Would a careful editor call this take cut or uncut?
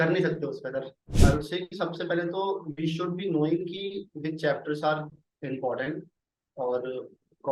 cut